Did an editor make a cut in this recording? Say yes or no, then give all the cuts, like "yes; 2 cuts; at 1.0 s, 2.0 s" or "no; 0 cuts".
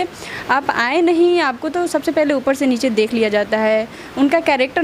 no; 0 cuts